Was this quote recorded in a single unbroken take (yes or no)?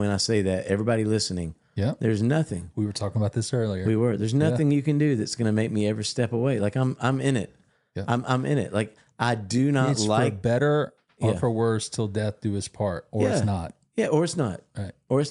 yes